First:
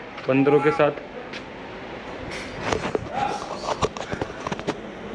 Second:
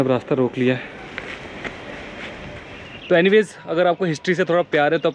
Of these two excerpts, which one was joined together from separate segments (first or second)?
second